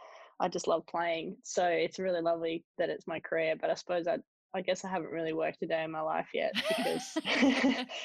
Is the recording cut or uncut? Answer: uncut